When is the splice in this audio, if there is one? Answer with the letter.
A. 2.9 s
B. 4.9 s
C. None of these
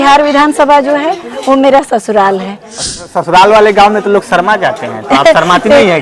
A